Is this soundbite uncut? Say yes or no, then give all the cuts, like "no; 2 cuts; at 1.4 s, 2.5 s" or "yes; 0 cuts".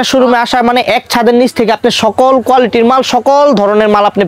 yes; 0 cuts